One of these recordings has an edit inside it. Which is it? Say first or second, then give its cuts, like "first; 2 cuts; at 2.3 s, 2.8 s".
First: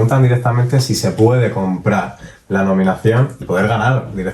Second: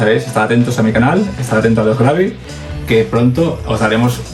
first; 1 cut; at 3.4 s